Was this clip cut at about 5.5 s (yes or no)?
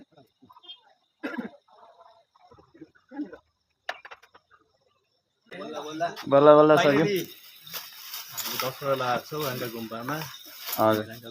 yes